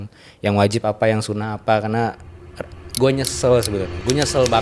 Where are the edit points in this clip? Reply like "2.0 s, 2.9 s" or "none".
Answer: none